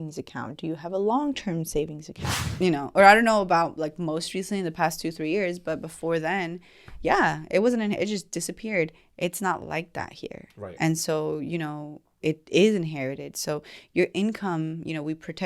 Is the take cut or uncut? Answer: cut